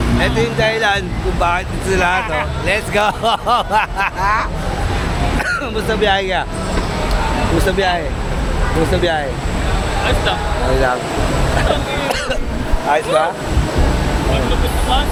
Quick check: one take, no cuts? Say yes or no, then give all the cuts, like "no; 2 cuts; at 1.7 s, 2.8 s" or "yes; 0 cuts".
yes; 0 cuts